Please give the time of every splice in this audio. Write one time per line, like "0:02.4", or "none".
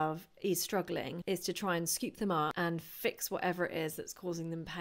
0:01.1
0:02.5